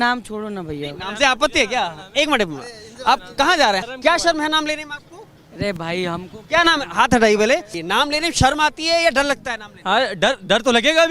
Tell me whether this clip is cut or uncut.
cut